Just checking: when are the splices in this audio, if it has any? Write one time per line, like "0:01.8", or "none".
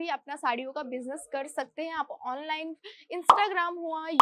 none

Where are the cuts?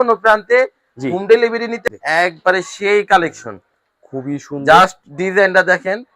0:01.8

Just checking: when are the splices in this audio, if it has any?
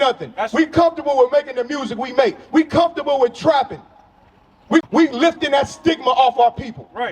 0:04.9

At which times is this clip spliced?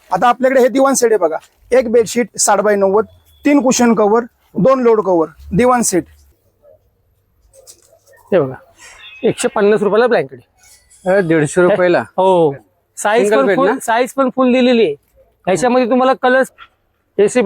0:06.2
0:16.5

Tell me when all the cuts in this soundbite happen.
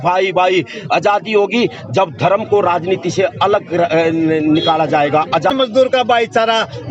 0:05.5

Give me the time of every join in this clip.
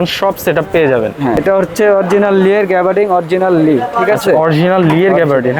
0:01.4

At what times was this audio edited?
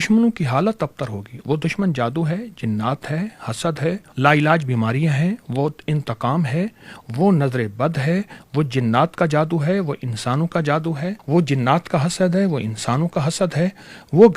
0:04.1
0:11.2

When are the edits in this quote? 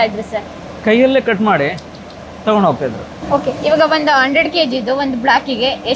0:03.1

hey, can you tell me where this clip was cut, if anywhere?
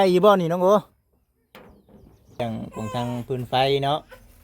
0:02.4

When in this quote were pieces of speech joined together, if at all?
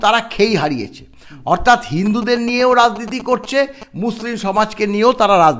none

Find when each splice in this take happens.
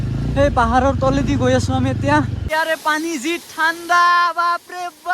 0:02.4

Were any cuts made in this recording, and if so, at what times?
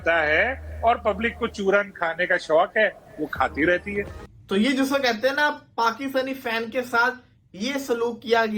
0:04.2

